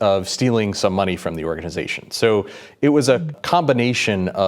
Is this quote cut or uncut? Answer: cut